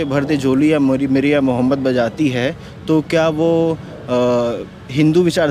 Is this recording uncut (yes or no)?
yes